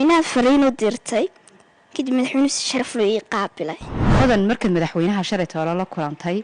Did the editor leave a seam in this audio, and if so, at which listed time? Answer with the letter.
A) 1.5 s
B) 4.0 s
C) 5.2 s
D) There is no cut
B